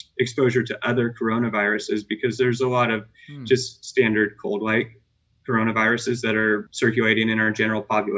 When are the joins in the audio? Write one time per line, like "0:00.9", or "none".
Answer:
0:06.7